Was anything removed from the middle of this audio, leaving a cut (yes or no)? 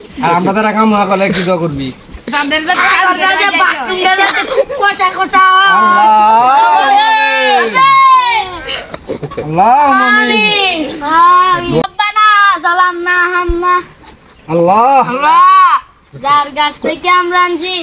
yes